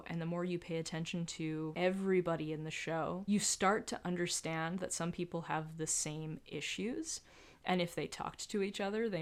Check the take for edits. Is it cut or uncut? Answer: uncut